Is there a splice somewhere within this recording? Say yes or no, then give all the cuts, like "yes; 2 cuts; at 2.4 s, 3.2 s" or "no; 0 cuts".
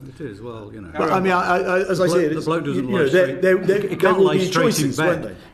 no; 0 cuts